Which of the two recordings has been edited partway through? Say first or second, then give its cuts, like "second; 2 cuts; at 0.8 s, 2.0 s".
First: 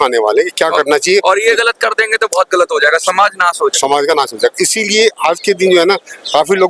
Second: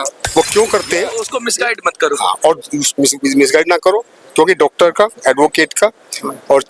second; 1 cut; at 1.4 s